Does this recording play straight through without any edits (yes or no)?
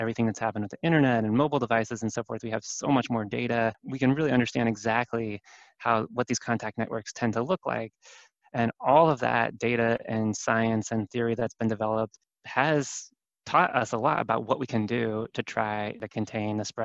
no